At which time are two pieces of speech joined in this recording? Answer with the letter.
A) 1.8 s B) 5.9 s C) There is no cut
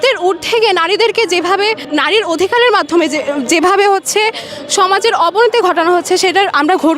A